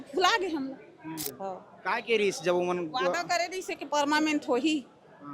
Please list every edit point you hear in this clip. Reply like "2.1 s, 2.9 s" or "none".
1.3 s